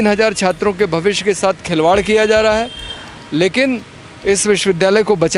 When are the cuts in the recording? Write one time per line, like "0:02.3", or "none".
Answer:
none